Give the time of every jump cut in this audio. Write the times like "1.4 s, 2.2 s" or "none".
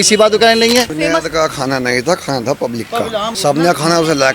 0.9 s, 3.3 s

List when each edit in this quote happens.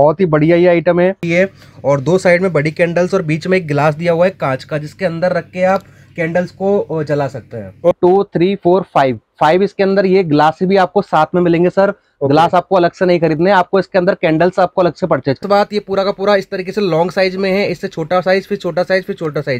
1.2 s, 7.9 s, 15.4 s

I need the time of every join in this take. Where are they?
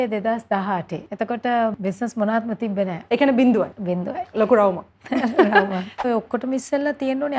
1.0 s, 1.7 s, 3.0 s, 3.8 s, 6.0 s

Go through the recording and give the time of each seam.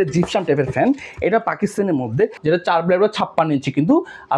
2.4 s

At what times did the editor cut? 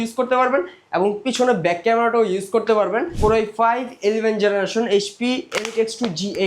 3.1 s

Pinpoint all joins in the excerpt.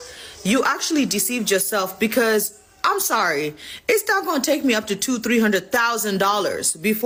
none

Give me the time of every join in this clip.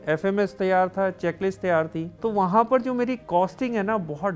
2.0 s, 3.2 s

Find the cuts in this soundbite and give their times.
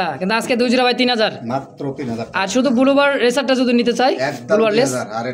none

